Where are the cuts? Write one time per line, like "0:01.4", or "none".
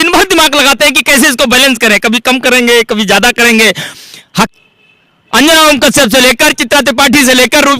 0:04.5